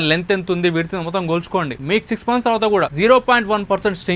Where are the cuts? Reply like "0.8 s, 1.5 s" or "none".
1.8 s, 2.9 s